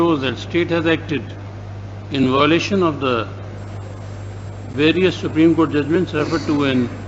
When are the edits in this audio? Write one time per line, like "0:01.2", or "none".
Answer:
none

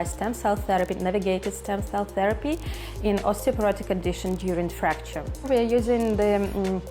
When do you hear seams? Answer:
0:05.5

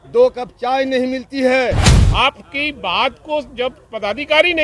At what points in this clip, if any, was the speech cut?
0:01.9

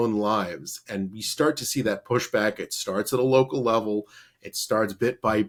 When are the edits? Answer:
none

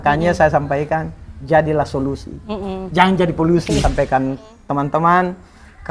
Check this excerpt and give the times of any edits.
0:03.8

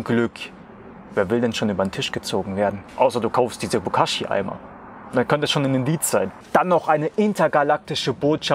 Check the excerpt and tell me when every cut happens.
0:06.4

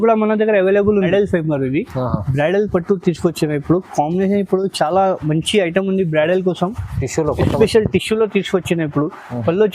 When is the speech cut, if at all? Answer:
0:01.1

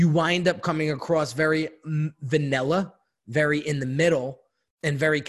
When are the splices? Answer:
none

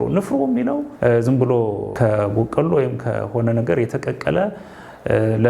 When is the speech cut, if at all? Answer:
0:00.9
0:01.9

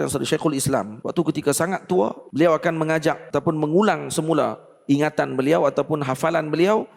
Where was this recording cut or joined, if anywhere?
0:01.0
0:02.2
0:03.2

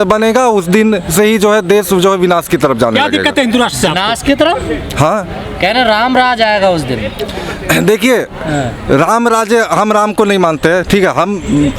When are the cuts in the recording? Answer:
none

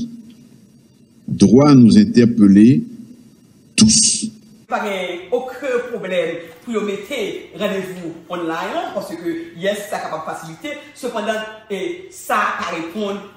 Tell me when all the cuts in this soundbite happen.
0:04.6

